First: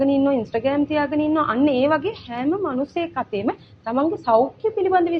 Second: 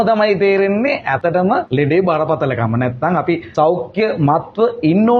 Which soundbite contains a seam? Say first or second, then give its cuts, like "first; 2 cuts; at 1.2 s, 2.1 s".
second; 2 cuts; at 1.4 s, 3.5 s